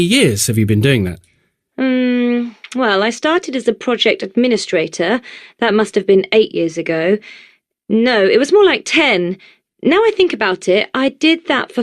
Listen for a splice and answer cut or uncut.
cut